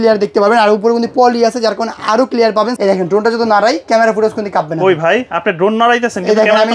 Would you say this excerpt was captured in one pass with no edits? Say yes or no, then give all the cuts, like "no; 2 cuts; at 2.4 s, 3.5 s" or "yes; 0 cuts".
no; 1 cut; at 2.7 s